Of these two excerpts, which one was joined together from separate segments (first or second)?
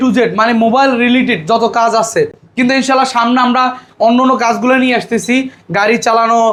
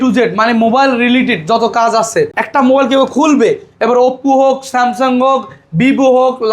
second